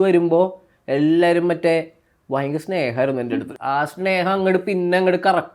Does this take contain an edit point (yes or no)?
yes